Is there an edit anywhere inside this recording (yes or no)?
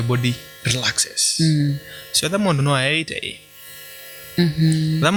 no